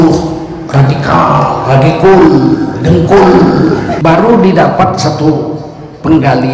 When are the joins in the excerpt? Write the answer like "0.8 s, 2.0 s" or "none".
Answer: 3.9 s